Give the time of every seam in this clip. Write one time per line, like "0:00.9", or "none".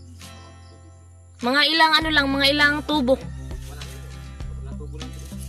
none